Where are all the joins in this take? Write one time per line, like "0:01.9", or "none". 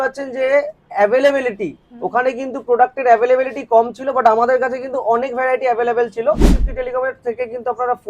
0:06.5